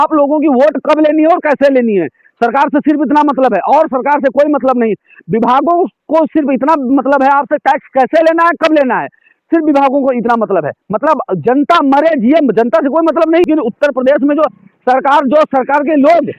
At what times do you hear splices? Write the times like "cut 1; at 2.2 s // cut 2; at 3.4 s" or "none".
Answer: cut 1; at 13.5 s